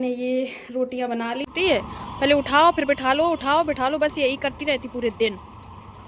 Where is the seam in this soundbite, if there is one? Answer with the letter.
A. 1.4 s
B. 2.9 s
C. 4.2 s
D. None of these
A